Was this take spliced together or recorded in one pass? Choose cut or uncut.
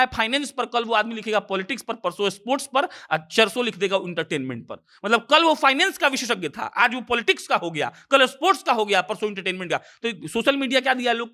uncut